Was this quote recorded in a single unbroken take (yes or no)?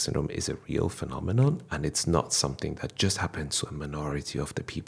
yes